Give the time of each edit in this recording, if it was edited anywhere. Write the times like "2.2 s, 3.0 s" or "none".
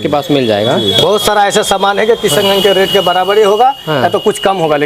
none